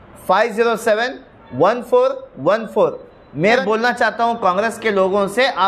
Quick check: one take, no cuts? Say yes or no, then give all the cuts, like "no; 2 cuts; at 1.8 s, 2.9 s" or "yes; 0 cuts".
no; 1 cut; at 3.6 s